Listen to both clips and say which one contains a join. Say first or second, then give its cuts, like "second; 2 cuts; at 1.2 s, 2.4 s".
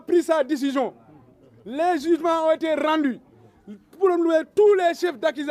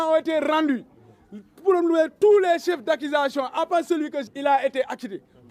second; 1 cut; at 4.2 s